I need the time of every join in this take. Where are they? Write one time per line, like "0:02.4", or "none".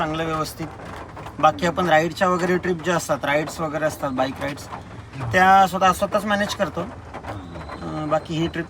none